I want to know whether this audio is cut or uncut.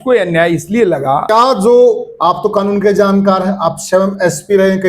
cut